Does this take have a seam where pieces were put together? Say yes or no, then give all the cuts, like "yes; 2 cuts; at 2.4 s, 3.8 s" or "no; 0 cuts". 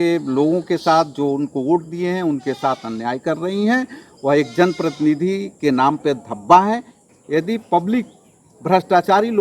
yes; 1 cut; at 7.0 s